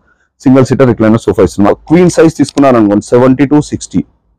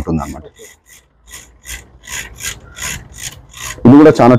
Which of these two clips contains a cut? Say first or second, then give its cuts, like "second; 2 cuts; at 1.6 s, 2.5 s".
first; 1 cut; at 1.7 s